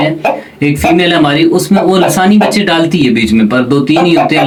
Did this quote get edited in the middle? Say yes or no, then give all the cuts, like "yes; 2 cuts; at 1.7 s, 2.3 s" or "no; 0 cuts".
no; 0 cuts